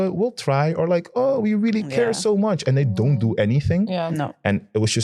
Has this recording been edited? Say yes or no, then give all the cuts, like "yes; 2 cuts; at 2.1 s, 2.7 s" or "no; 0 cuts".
no; 0 cuts